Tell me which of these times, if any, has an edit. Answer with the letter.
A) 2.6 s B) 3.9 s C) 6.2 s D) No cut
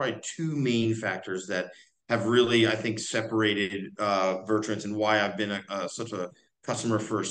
D